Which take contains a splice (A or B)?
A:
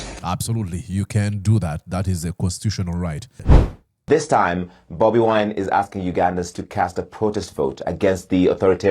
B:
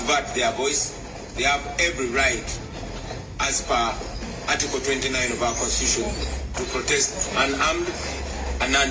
A